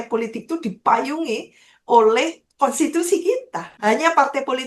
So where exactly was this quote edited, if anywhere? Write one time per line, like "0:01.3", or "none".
0:03.6